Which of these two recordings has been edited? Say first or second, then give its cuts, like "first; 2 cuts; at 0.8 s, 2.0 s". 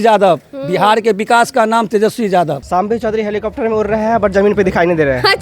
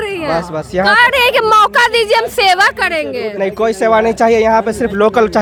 first; 1 cut; at 2.6 s